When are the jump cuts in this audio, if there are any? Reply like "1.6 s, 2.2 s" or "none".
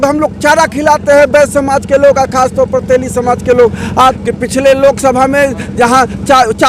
4.2 s